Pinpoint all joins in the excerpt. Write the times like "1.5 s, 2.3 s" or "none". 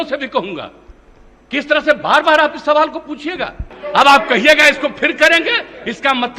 3.6 s